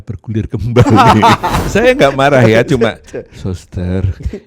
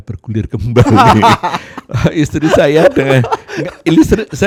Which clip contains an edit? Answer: first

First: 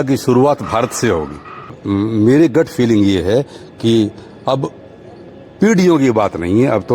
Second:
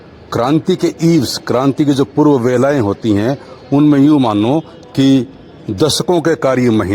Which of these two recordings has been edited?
first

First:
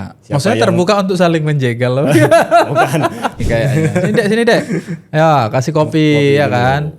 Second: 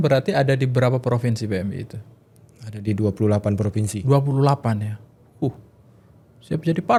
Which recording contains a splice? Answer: first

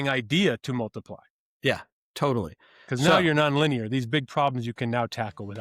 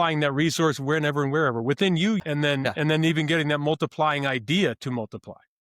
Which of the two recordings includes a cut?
second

